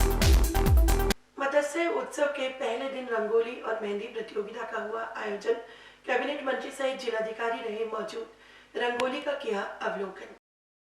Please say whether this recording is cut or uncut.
cut